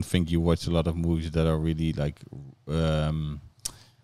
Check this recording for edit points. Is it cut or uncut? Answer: uncut